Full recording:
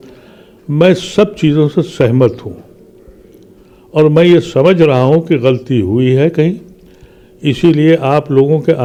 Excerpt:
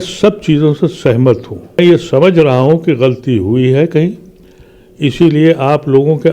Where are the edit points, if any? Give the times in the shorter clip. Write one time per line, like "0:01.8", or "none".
0:01.8